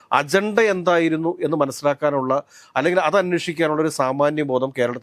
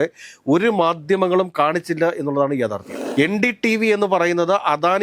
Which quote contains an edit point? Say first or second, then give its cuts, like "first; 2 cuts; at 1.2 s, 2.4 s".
second; 1 cut; at 2.9 s